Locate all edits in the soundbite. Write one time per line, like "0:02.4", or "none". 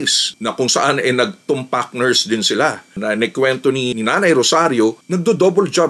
none